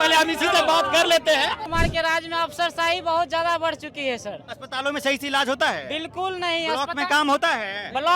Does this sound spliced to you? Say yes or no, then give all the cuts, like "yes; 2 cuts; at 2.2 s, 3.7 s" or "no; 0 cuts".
yes; 1 cut; at 1.6 s